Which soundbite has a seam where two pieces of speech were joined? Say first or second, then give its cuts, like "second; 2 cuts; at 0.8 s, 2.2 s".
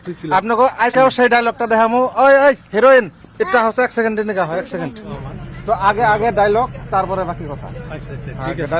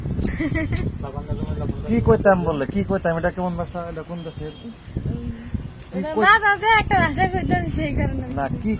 first; 2 cuts; at 0.9 s, 5.1 s